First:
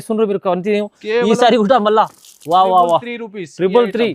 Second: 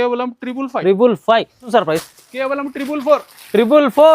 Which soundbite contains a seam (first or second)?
second